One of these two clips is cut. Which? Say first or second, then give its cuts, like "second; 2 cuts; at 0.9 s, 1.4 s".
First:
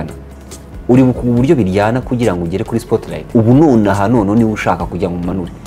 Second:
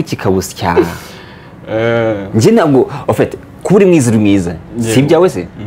first; 1 cut; at 3.2 s